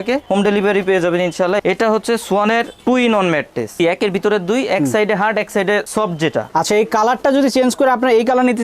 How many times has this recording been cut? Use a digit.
3